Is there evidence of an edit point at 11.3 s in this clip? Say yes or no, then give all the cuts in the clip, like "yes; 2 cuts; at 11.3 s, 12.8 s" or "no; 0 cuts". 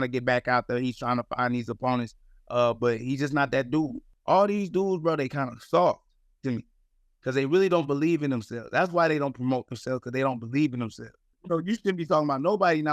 yes; 2 cuts; at 4.1 s, 11.3 s